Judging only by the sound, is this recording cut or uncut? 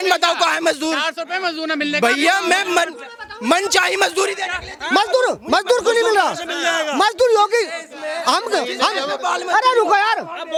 uncut